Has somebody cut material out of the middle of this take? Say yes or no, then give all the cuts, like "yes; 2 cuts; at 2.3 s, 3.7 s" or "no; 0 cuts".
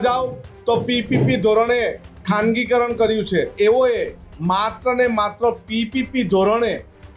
yes; 1 cut; at 3.5 s